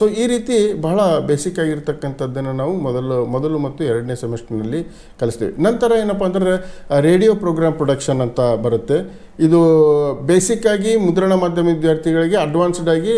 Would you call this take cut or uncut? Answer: uncut